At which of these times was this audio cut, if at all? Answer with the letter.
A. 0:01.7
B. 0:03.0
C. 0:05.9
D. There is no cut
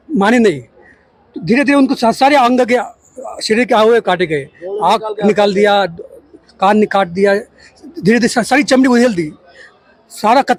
D